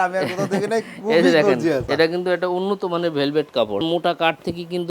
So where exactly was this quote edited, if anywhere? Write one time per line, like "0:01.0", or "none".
0:01.9
0:03.8